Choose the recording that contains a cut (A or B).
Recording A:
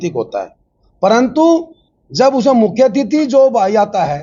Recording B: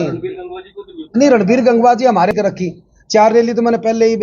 B